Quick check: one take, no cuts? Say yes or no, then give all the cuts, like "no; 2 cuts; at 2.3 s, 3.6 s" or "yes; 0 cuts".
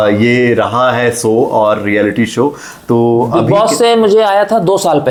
yes; 0 cuts